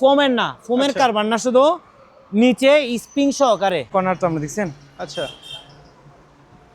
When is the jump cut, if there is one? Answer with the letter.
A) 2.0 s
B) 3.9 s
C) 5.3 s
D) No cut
B